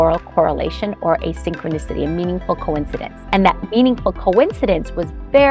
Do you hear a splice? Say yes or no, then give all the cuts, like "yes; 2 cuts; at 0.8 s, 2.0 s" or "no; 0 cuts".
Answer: yes; 1 cut; at 3.3 s